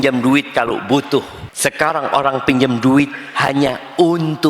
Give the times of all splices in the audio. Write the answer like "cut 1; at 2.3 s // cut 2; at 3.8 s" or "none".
cut 1; at 1.4 s